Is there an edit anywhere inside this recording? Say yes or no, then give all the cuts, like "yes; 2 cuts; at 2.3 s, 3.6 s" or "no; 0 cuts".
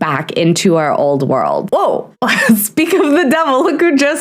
yes; 1 cut; at 1.7 s